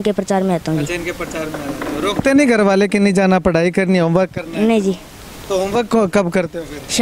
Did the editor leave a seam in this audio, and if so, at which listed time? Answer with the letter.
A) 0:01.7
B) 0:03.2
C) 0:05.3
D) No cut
D